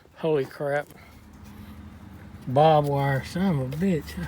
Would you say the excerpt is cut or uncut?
cut